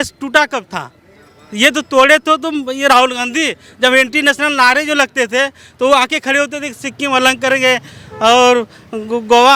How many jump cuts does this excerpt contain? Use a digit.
0